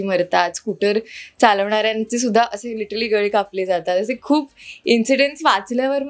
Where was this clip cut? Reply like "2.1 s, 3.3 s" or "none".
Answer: none